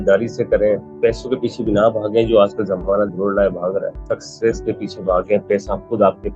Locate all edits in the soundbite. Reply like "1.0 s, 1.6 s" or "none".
0.9 s, 3.9 s